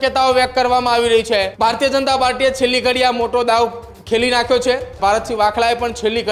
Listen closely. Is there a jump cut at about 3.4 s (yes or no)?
no